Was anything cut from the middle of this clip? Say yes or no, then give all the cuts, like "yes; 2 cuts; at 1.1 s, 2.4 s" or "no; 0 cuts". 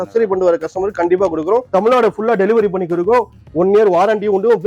yes; 1 cut; at 1.7 s